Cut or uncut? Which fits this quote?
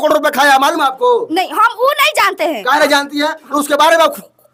uncut